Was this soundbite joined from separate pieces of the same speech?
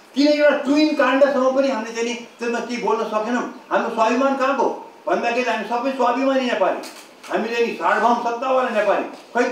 no; 0 cuts

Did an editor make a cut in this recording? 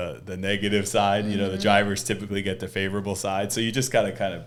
no; 0 cuts

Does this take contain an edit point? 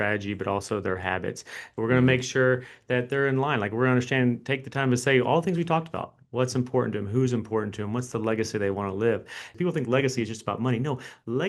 yes; 1 cut; at 9.5 s

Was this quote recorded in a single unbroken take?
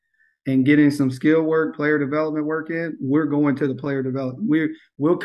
yes; 0 cuts

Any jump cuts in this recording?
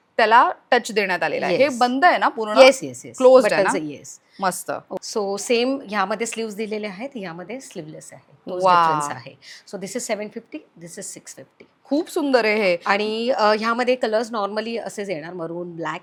no; 0 cuts

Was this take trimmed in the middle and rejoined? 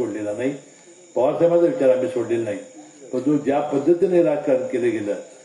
no; 0 cuts

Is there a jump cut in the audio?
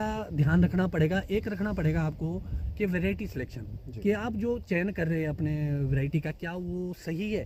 no; 0 cuts

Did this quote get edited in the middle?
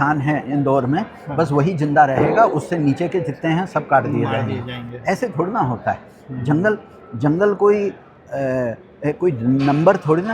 no; 0 cuts

